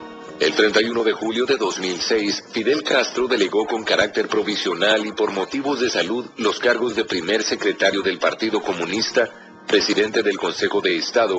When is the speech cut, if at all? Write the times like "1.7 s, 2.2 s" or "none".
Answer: 10.4 s